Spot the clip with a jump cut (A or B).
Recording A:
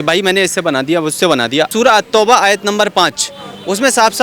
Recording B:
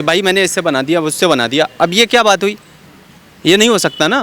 A